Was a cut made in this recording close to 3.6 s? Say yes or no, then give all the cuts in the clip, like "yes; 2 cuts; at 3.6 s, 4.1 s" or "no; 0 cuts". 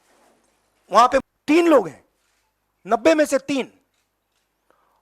no; 1 cut; at 1.2 s